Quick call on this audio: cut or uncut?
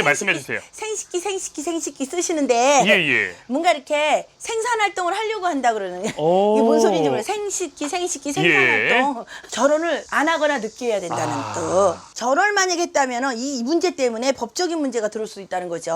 cut